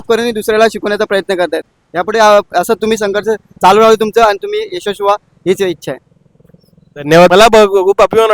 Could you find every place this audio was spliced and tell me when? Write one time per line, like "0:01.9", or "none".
0:07.3